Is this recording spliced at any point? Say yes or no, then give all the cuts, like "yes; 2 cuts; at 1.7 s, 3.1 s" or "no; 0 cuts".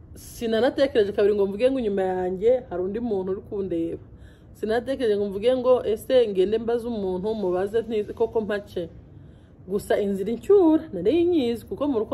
no; 0 cuts